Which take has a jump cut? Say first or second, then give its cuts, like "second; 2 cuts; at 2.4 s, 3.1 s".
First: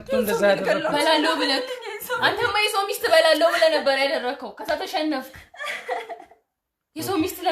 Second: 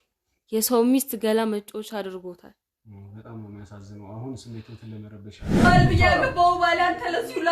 second; 1 cut; at 5.5 s